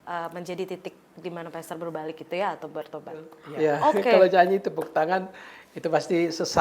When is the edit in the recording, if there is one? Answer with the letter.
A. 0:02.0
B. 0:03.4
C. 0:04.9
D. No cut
B